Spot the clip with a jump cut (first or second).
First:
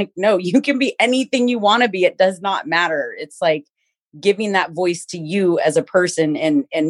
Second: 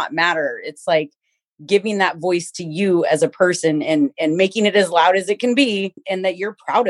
second